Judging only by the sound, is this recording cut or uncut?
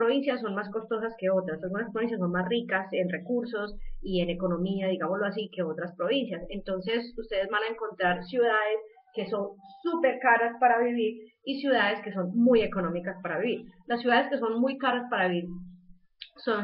cut